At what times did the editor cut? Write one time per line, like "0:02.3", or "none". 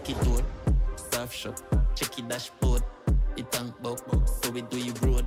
none